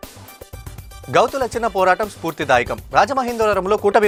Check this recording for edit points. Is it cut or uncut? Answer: uncut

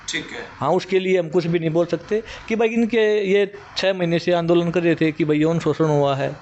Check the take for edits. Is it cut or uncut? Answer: uncut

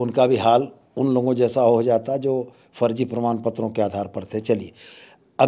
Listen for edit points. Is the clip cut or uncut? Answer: uncut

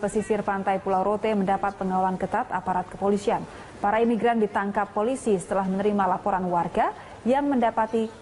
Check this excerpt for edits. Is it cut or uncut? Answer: cut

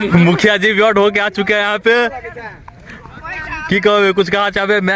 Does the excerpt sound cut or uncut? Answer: uncut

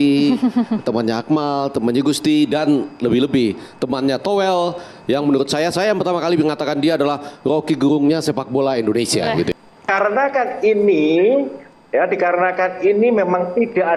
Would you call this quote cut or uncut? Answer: cut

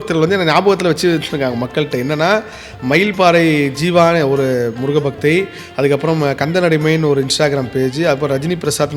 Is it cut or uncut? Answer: uncut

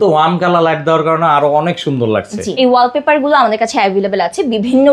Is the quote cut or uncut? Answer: cut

